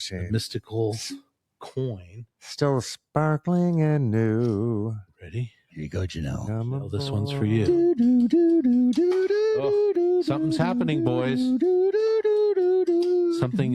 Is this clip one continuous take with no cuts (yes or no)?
yes